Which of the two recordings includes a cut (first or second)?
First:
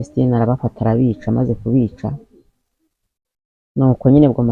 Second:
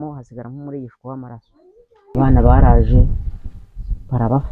second